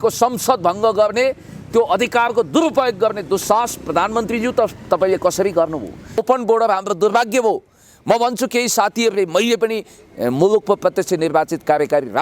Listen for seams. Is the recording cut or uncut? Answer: cut